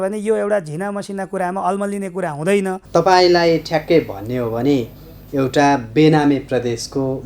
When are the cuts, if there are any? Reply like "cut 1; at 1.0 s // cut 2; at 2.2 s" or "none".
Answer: cut 1; at 2.8 s